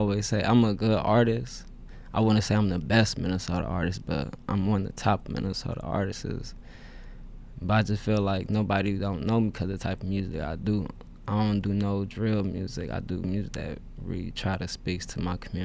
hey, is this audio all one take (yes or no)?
yes